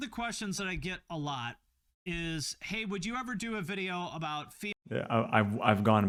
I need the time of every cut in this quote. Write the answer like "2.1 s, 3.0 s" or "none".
none